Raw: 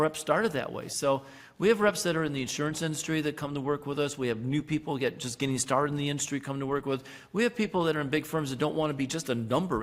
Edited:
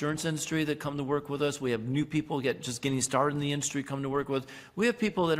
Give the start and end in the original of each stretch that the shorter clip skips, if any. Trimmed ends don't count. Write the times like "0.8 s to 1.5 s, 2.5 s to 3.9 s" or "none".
none